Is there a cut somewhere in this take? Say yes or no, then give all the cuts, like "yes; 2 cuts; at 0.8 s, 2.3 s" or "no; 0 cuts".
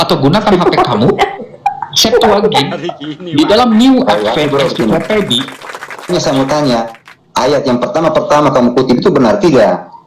yes; 1 cut; at 6.1 s